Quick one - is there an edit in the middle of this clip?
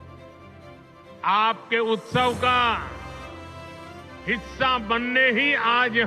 no; 0 cuts

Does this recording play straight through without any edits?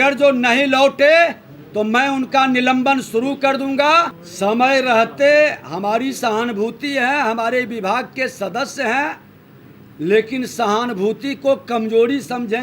no; 1 cut; at 4.2 s

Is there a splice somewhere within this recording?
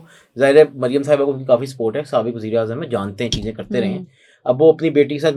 no; 0 cuts

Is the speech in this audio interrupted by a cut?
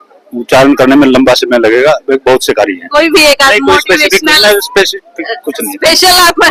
no; 0 cuts

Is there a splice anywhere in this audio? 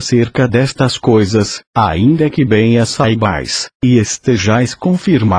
no; 0 cuts

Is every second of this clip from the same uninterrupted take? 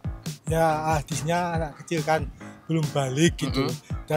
yes; 0 cuts

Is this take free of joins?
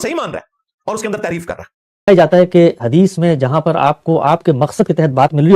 no; 1 cut; at 2.1 s

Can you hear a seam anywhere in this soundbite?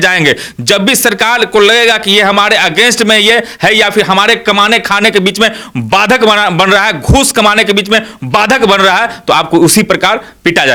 no; 0 cuts

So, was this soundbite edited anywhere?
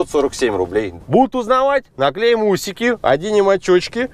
yes; 1 cut; at 1.0 s

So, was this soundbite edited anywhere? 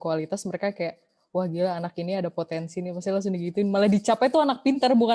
no; 0 cuts

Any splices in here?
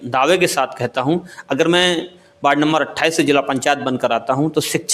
no; 0 cuts

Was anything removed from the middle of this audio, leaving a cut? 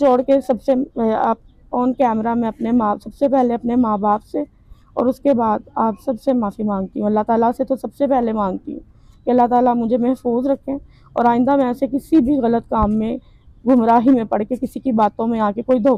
no; 0 cuts

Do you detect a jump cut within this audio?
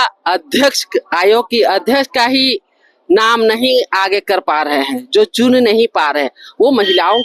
no; 0 cuts

